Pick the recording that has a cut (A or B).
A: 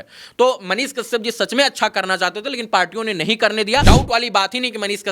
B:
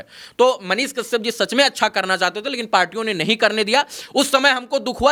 A